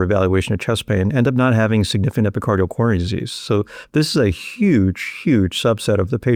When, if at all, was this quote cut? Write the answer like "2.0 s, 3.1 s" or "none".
none